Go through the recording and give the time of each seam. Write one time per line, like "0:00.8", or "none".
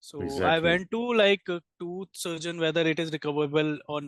none